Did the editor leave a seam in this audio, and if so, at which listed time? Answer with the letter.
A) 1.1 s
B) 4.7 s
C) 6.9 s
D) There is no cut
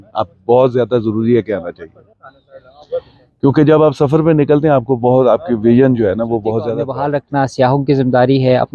C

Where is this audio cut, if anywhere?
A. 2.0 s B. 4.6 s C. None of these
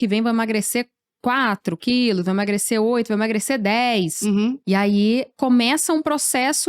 B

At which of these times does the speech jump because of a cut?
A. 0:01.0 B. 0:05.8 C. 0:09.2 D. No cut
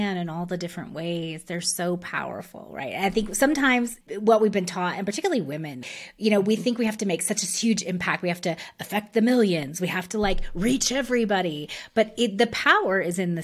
B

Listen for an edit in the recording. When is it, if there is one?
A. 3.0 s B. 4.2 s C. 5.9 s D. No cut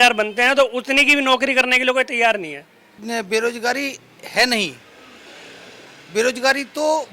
A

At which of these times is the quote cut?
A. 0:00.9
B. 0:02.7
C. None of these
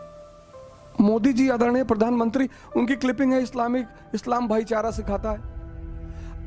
A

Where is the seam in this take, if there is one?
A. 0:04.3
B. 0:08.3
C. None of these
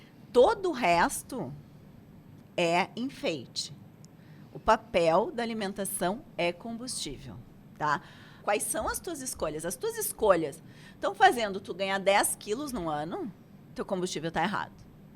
B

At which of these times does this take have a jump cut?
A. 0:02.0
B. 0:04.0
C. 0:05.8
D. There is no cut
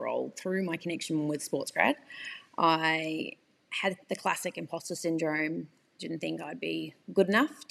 D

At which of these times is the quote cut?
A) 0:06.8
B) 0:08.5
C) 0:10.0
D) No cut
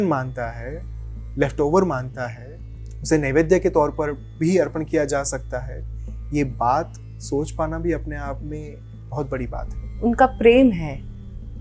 C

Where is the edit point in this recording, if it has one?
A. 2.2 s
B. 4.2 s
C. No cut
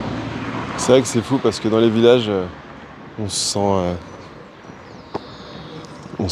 C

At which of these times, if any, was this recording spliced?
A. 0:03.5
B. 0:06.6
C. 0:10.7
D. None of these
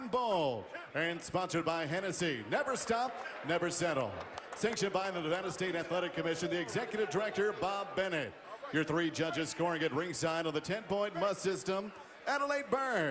A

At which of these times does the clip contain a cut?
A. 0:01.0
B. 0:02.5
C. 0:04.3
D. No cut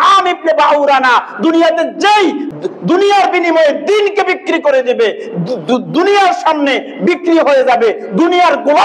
B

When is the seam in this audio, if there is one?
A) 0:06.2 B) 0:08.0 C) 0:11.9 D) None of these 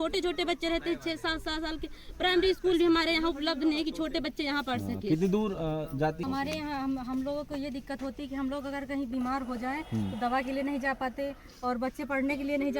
A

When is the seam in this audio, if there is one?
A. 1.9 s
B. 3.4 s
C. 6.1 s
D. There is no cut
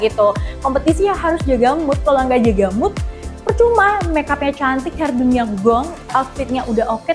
C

